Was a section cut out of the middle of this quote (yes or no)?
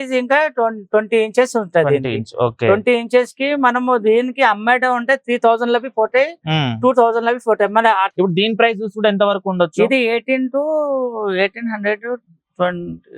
yes